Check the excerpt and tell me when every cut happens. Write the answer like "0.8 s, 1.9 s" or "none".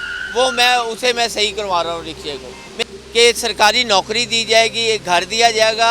2.7 s

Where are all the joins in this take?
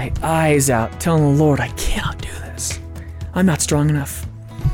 0.9 s

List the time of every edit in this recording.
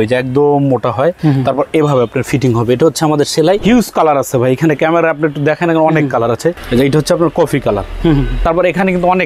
1.2 s, 3.6 s, 6.5 s, 8.3 s

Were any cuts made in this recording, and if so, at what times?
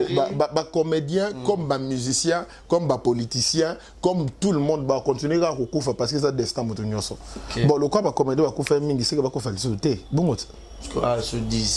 none

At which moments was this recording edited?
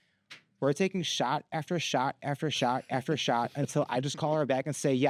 none

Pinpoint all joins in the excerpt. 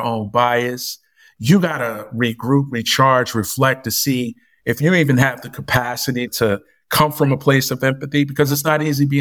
none

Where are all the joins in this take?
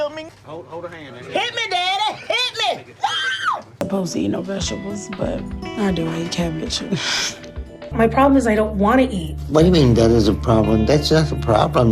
3.7 s, 7.8 s

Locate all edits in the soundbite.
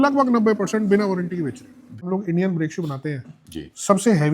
2.0 s

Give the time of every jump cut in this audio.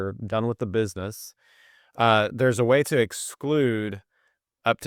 none

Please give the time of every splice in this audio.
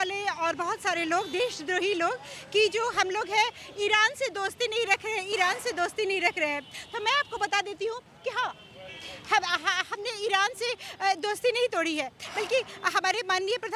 none

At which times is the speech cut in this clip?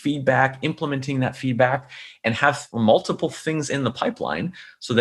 2.7 s

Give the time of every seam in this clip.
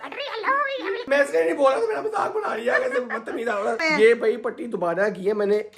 1.0 s, 3.8 s

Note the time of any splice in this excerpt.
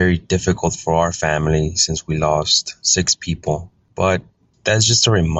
3.8 s

